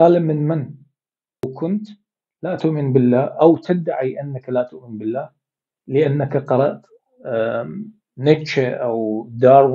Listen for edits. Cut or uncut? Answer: cut